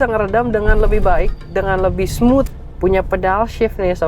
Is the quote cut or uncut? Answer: cut